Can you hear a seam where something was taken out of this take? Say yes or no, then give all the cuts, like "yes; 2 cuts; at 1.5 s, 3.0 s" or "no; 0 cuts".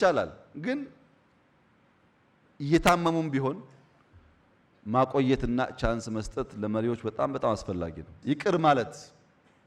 yes; 1 cut; at 8.1 s